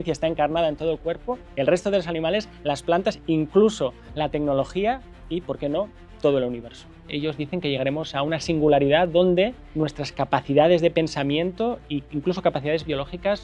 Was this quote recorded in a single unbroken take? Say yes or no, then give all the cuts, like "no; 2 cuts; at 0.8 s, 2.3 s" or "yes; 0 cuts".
no; 4 cuts; at 1.4 s, 4.0 s, 7.1 s, 9.6 s